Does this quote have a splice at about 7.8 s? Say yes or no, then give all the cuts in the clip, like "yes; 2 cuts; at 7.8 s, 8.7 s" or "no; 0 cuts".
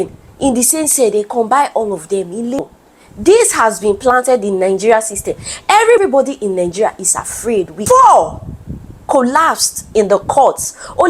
yes; 2 cuts; at 2.6 s, 7.8 s